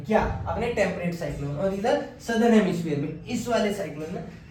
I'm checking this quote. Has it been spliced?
no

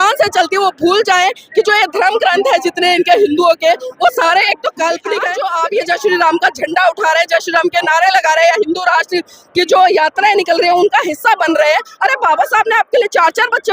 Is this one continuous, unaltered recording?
no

